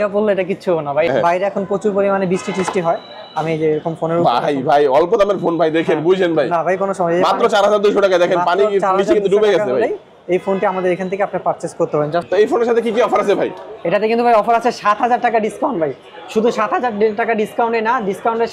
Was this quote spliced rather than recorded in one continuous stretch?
yes; 2 cuts; at 1.1 s, 12.3 s

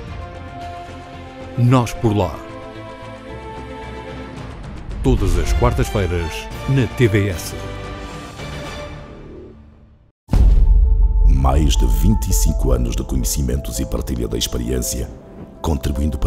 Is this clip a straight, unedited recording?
no; 1 cut; at 10.2 s

